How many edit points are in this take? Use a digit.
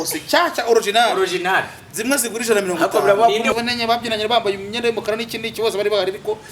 1